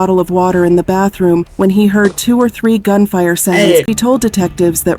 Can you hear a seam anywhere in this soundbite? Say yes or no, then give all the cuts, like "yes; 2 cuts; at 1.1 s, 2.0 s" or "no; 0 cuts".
yes; 1 cut; at 3.8 s